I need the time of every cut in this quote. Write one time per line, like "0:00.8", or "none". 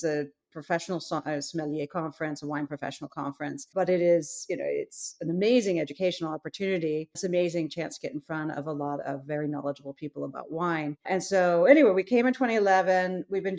none